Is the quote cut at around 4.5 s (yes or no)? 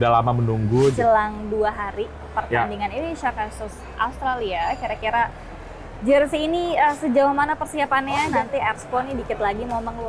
no